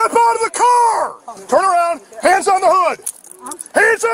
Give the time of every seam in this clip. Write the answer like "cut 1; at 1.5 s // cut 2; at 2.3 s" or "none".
cut 1; at 1.3 s